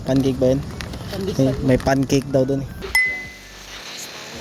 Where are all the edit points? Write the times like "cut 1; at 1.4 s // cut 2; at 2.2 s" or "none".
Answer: none

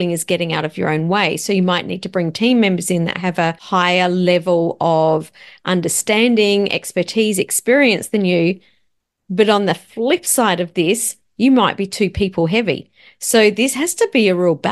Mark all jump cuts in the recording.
cut 1; at 3.6 s

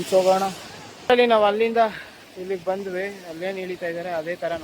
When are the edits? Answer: cut 1; at 1.0 s

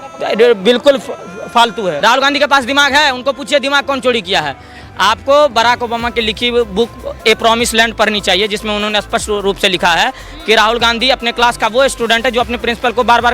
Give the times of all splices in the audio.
cut 1; at 2.0 s // cut 2; at 3.7 s

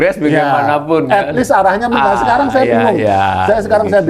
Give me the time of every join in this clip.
none

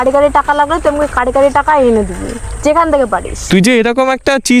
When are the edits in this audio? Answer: cut 1; at 3.3 s

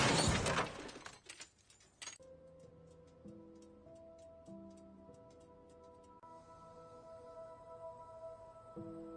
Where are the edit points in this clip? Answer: none

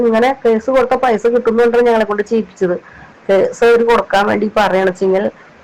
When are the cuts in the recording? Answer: cut 1; at 3.1 s

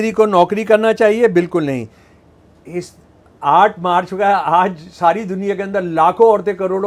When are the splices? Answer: none

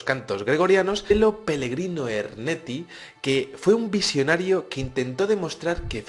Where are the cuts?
none

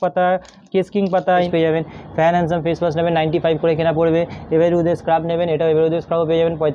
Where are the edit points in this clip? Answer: cut 1; at 1.5 s

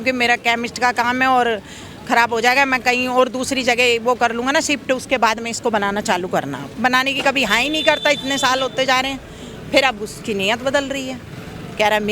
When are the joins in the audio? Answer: cut 1; at 6.6 s

